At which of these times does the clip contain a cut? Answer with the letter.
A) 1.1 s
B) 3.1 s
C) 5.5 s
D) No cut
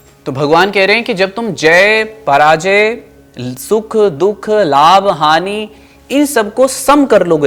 D